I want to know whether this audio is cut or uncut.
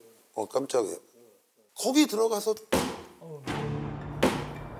uncut